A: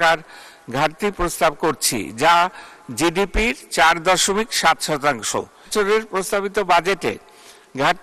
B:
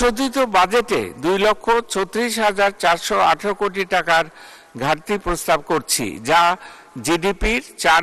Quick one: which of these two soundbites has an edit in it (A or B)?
A